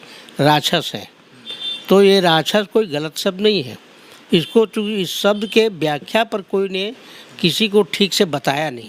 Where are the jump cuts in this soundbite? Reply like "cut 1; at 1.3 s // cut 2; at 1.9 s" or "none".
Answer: none